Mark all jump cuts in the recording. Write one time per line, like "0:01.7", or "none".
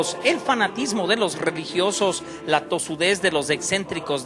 none